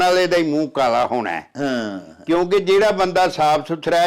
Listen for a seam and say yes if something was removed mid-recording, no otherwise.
no